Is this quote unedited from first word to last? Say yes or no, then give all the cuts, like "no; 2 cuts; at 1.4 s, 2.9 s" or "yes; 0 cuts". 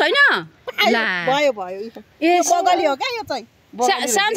yes; 0 cuts